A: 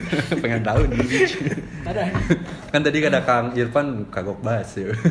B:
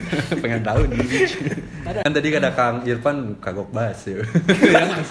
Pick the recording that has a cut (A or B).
B